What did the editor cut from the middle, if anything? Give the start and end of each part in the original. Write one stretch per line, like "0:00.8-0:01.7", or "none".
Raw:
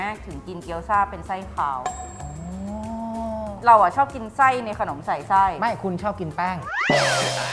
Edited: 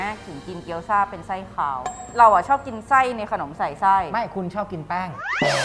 0:02.1-0:03.5